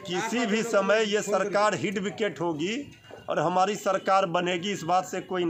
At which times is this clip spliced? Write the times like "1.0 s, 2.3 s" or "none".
none